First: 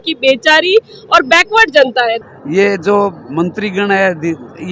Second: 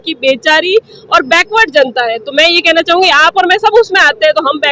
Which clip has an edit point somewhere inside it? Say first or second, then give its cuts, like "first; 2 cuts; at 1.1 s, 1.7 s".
first; 1 cut; at 2.2 s